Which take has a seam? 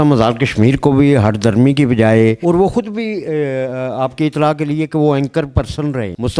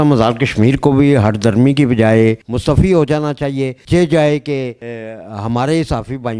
second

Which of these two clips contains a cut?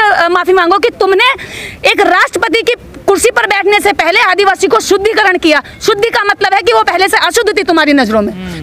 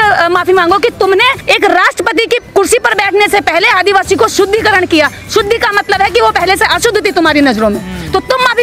second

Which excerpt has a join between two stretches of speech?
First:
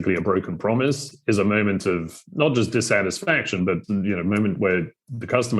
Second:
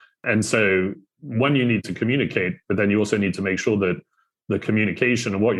first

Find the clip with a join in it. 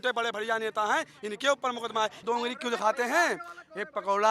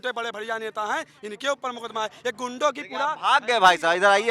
first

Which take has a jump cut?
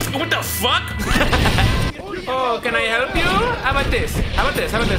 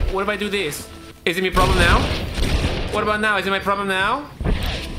first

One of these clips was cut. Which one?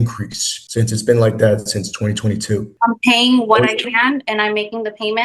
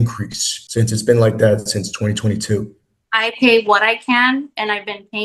first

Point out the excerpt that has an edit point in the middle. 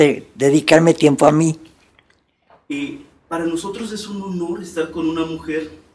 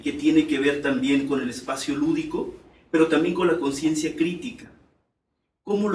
first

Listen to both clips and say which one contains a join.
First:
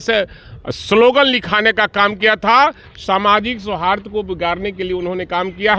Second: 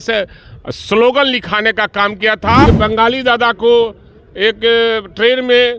second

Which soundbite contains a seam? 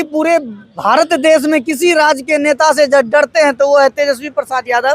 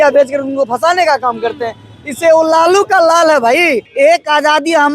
second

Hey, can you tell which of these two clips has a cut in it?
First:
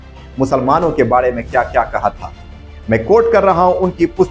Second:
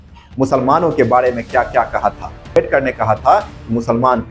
second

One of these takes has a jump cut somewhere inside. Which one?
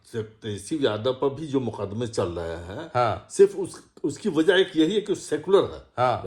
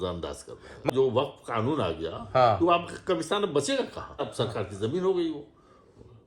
second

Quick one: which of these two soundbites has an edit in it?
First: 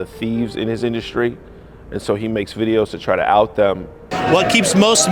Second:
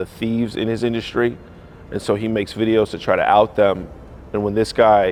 first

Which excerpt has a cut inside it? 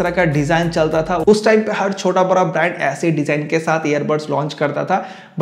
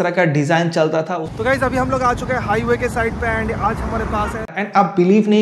second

